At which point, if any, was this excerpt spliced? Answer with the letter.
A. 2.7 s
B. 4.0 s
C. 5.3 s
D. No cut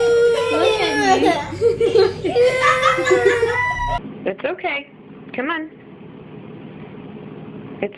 B